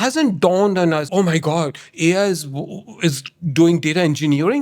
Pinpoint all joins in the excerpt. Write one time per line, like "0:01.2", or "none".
0:01.1